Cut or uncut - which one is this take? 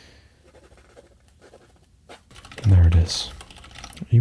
cut